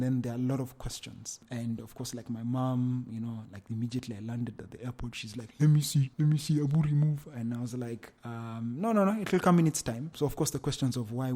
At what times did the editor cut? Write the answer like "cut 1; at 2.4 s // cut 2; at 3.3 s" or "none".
none